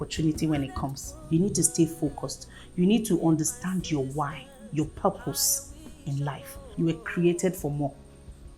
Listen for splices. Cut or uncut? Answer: cut